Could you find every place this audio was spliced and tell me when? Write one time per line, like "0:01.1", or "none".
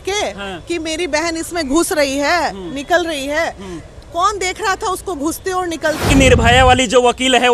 0:06.1